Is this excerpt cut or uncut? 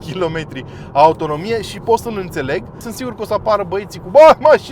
cut